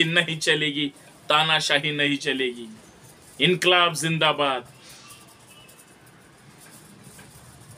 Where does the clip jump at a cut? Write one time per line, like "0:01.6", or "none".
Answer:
none